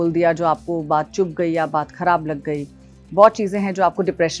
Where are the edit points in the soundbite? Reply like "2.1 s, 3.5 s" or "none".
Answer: none